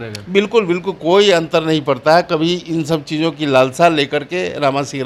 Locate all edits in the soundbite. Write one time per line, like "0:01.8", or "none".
none